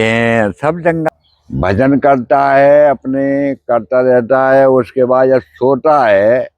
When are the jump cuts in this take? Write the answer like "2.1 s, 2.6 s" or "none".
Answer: 1.1 s